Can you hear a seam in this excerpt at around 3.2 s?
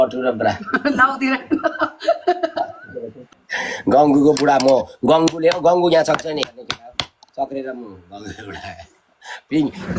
yes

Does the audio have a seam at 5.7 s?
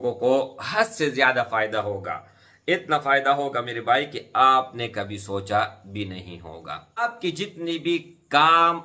no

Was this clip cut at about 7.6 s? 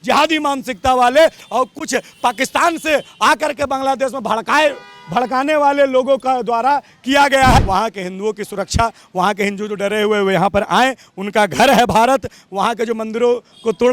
yes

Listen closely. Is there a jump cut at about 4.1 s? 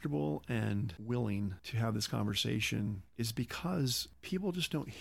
yes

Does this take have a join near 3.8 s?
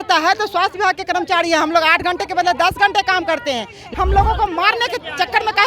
yes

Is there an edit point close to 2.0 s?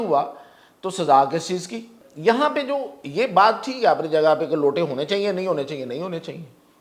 yes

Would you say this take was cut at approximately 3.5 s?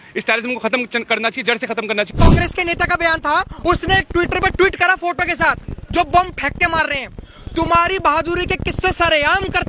yes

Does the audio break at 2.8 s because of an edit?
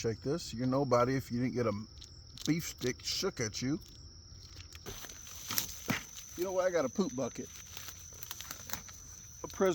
no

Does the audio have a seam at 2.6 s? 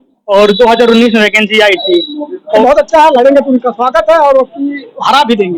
yes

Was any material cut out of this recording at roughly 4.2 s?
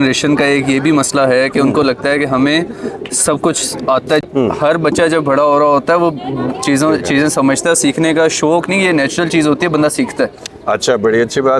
yes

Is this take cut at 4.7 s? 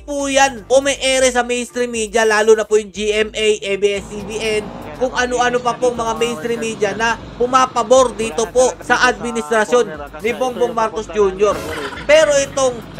no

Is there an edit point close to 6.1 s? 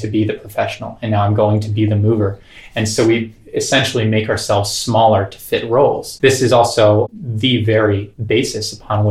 yes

